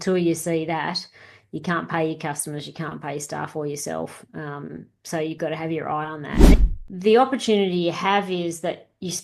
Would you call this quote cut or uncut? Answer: cut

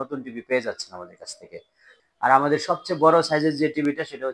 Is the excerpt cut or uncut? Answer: cut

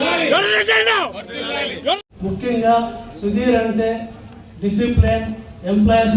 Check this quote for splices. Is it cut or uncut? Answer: cut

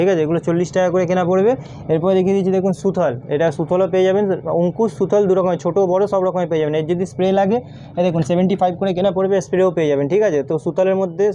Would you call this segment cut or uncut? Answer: uncut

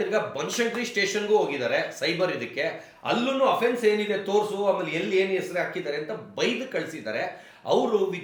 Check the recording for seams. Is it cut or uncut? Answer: uncut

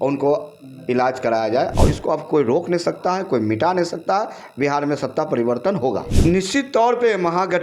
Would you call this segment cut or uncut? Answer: cut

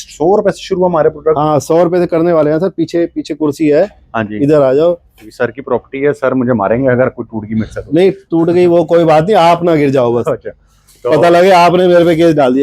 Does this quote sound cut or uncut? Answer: uncut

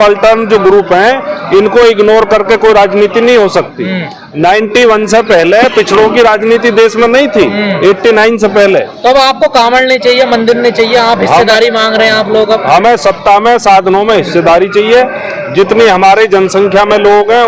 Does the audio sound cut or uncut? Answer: uncut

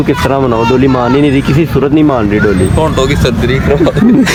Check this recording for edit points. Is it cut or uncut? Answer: uncut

